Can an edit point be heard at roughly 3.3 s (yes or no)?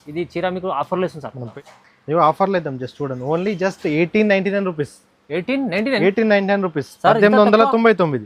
no